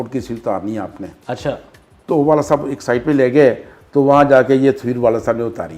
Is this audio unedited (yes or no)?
yes